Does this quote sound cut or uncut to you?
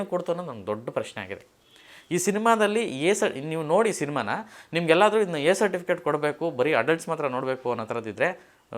uncut